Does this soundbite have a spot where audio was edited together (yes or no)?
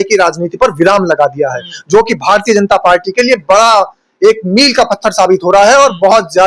no